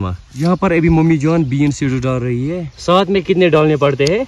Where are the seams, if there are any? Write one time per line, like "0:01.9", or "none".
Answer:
0:02.3